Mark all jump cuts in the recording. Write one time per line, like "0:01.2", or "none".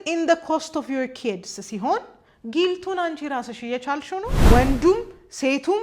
0:04.4